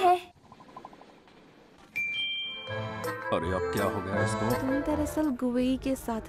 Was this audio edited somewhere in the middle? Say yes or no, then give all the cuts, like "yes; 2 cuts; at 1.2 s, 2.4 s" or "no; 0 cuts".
yes; 2 cuts; at 2.7 s, 4.7 s